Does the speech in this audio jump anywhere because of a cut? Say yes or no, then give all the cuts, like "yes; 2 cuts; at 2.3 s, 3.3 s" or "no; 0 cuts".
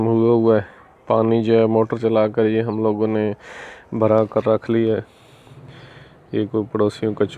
no; 0 cuts